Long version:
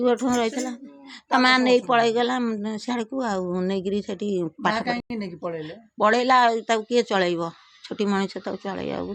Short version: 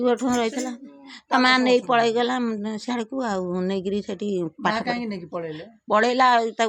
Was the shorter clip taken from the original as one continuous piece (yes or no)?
no